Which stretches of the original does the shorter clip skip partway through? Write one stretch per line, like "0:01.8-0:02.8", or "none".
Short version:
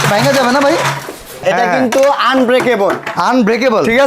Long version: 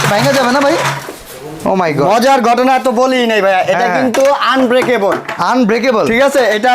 0:01.4-0:03.6